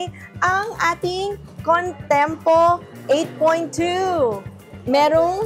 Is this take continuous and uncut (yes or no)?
yes